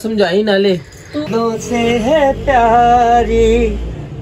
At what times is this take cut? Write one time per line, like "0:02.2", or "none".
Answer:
0:01.3